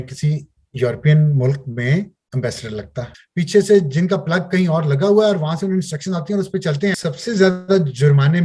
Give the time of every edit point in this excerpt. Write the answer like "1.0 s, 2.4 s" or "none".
3.2 s, 7.0 s